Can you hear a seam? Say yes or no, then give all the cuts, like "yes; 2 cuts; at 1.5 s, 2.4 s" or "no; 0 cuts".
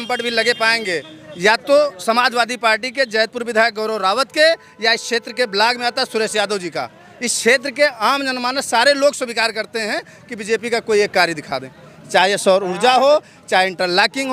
no; 0 cuts